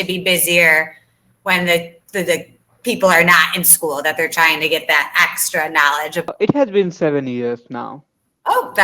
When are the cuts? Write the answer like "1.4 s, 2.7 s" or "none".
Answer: 6.3 s